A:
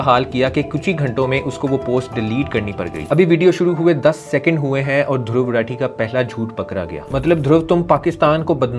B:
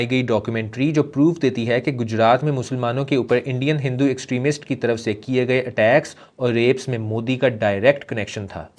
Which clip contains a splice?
A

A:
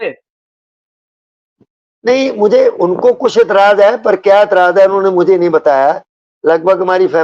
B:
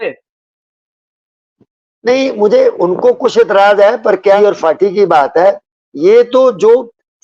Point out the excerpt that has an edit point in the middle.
B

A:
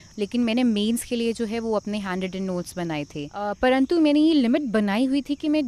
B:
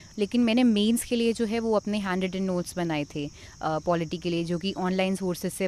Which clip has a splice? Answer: A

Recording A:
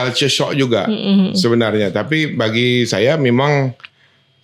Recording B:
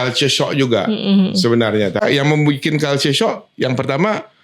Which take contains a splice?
B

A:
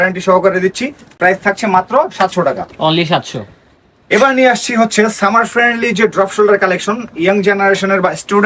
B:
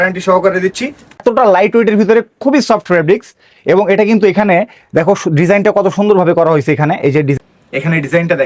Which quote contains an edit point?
B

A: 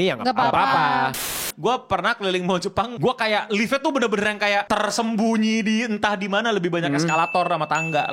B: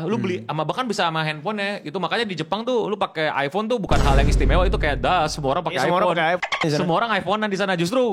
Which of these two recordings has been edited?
A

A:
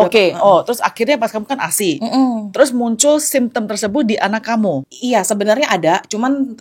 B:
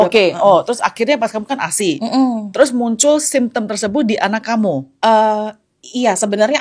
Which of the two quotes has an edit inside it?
A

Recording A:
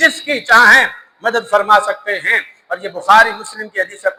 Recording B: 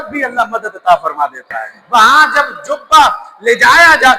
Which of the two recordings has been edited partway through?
B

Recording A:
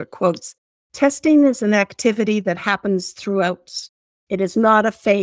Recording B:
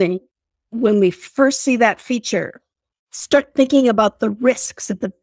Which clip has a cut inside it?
B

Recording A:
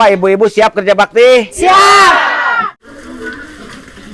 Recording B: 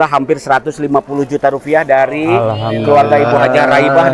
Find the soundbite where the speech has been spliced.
A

